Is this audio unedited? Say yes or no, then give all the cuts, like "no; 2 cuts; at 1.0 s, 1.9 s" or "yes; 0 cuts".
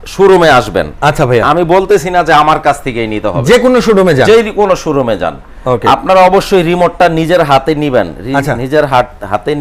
yes; 0 cuts